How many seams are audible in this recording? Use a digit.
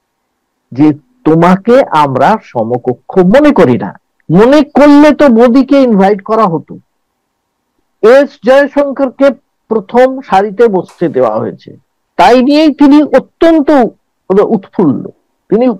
0